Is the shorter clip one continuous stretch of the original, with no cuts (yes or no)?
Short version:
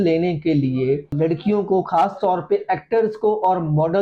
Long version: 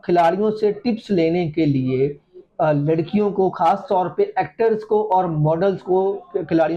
no